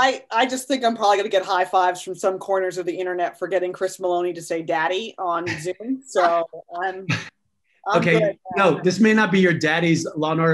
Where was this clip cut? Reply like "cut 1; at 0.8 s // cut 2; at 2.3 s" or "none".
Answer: none